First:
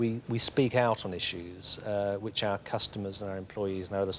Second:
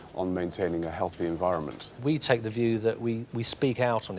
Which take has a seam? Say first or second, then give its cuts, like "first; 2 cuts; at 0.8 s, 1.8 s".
second; 1 cut; at 1.8 s